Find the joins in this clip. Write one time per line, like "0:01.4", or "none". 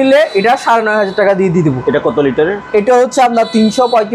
none